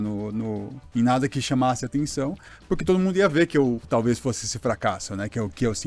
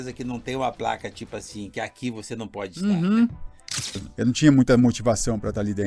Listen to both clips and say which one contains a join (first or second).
second